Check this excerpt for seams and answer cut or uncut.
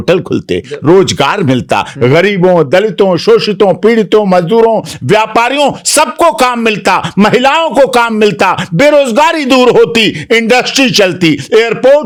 uncut